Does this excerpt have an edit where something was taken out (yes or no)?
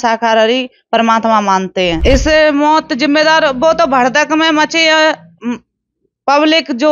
yes